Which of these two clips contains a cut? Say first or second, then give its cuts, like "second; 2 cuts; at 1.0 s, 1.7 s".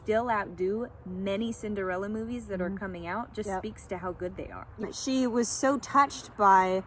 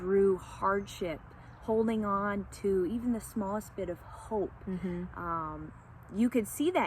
first; 1 cut; at 4.8 s